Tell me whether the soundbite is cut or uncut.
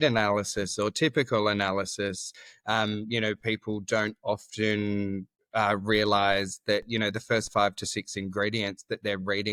uncut